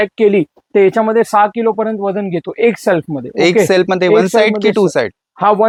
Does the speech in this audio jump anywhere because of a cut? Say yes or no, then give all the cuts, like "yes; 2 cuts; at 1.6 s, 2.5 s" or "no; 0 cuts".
no; 0 cuts